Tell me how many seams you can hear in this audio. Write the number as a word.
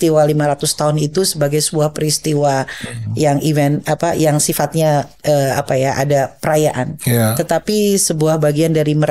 zero